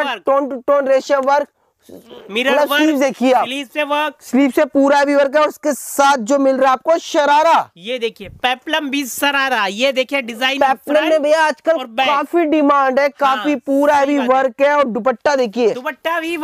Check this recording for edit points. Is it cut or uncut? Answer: uncut